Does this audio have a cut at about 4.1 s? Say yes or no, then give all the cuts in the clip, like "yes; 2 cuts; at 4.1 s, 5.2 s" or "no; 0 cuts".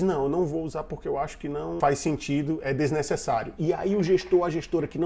no; 1 cut; at 1.8 s